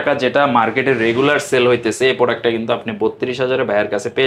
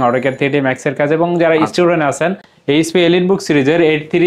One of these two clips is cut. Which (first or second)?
second